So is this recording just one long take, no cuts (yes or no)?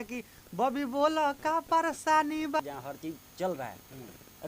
no